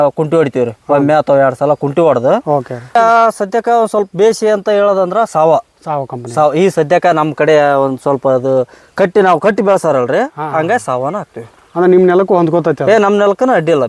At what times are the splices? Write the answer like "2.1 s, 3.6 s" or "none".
3.0 s